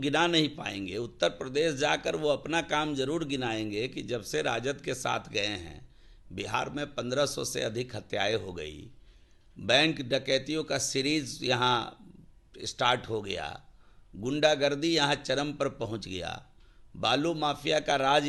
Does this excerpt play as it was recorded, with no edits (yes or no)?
yes